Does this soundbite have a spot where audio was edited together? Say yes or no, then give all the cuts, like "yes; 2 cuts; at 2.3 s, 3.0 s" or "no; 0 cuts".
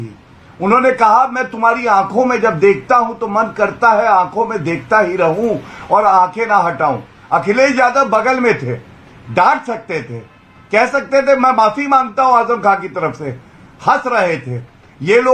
no; 0 cuts